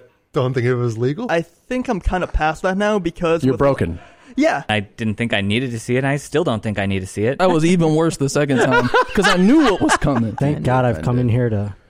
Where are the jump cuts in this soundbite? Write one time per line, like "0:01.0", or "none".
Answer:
0:01.3
0:04.7
0:07.4
0:10.4